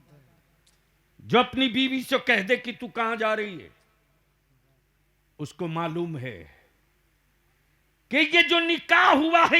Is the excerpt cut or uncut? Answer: cut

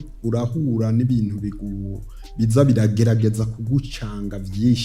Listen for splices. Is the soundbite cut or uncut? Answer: uncut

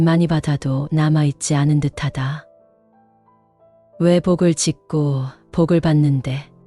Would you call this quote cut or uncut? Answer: cut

